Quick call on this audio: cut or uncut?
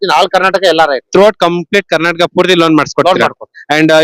uncut